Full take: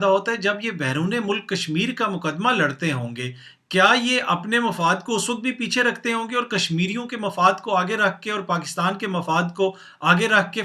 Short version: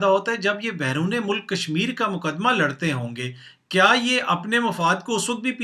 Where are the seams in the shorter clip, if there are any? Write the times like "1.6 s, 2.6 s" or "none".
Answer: none